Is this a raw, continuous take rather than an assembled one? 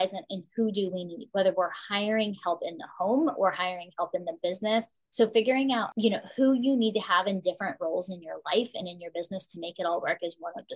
no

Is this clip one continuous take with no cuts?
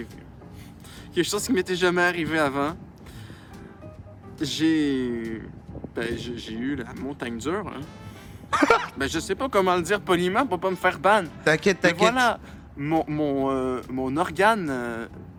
yes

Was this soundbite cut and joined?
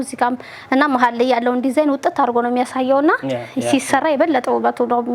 no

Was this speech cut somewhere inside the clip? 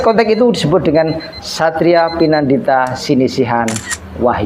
no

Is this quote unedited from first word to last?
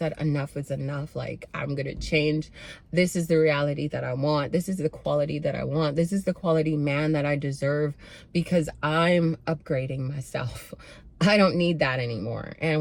yes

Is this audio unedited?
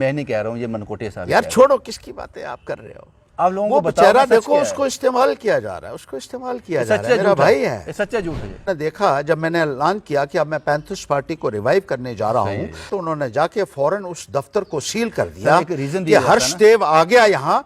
no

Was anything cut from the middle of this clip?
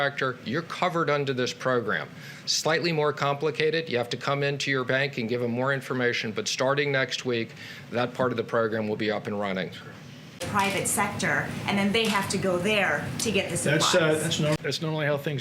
yes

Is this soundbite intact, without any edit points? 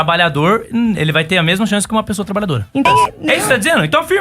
no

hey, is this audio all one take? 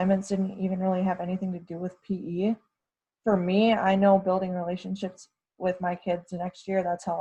yes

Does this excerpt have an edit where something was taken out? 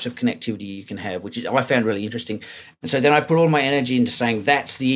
no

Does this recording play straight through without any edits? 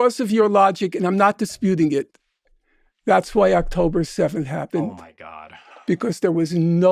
yes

